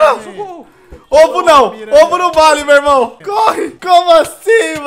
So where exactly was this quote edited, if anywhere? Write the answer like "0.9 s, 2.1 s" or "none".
3.7 s